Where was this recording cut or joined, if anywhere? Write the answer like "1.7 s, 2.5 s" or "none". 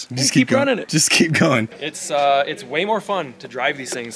1.8 s